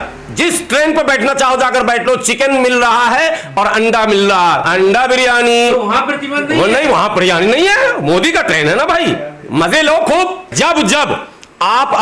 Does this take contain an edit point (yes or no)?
yes